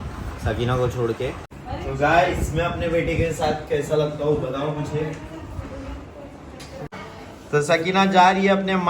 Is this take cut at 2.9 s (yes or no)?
no